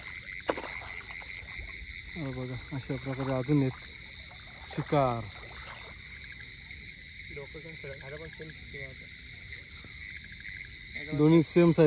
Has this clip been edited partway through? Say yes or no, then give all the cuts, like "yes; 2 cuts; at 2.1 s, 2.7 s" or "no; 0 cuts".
no; 0 cuts